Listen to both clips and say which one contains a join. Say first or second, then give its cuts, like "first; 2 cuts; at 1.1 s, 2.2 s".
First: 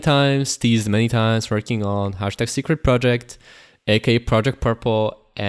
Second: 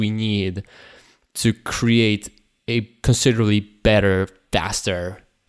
second; 2 cuts; at 2.9 s, 4.4 s